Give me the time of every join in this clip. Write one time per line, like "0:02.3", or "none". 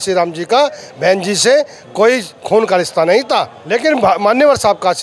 0:03.6